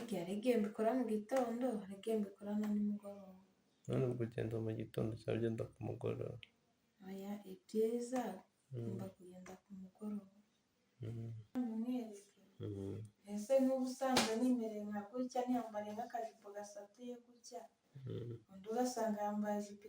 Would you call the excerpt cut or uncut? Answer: cut